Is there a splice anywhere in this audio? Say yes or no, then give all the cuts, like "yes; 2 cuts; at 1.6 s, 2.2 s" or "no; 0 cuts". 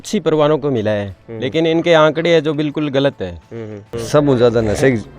yes; 1 cut; at 3.9 s